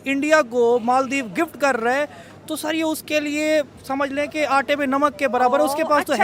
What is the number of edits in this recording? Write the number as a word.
zero